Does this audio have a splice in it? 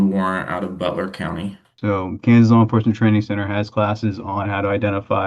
yes; 1 cut; at 1.6 s

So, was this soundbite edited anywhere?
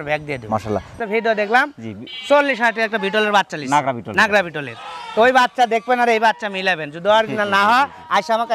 yes; 1 cut; at 0.9 s

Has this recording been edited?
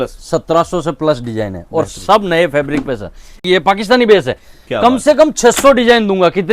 yes; 1 cut; at 3.4 s

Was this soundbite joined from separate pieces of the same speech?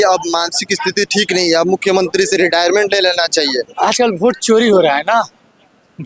yes; 1 cut; at 3.7 s

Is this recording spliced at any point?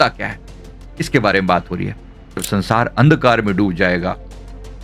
yes; 1 cut; at 2.5 s

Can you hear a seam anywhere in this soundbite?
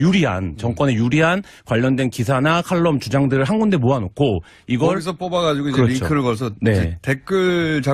yes; 1 cut; at 6.6 s

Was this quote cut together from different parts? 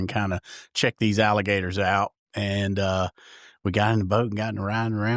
no; 0 cuts

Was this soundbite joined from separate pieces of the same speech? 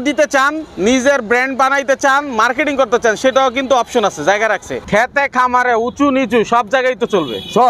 yes; 1 cut; at 4.7 s

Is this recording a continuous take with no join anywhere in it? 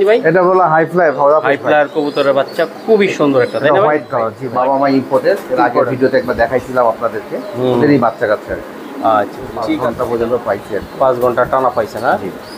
no; 2 cuts; at 4.4 s, 9.8 s

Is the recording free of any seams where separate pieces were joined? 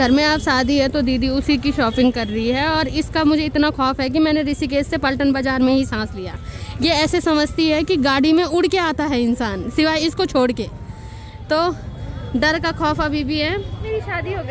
yes; 0 cuts

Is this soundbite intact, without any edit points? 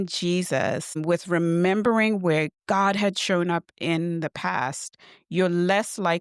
no; 1 cut; at 1.0 s

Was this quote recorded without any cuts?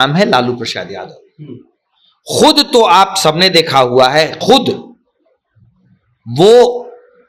yes; 0 cuts

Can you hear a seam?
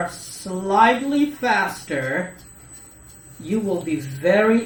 no; 0 cuts

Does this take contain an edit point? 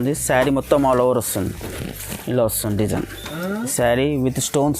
yes; 1 cut; at 3.7 s

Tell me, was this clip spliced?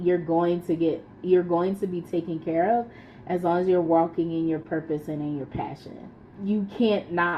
yes; 1 cut; at 6.3 s

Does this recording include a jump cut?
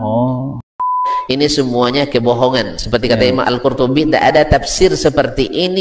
yes; 1 cut; at 1.1 s

